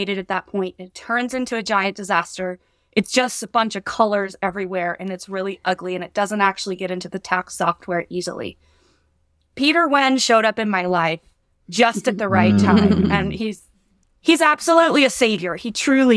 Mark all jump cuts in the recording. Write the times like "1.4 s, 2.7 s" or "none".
none